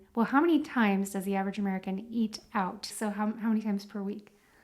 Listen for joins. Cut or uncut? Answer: cut